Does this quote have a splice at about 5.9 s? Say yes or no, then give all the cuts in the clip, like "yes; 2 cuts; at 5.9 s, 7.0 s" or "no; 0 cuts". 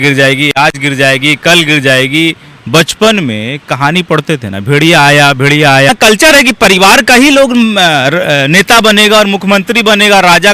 yes; 1 cut; at 5.9 s